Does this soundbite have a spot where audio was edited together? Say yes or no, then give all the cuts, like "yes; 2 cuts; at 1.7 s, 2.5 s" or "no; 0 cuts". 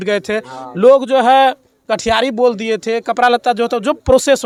no; 0 cuts